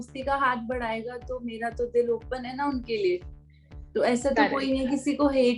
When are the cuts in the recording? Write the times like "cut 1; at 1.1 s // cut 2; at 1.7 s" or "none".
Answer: none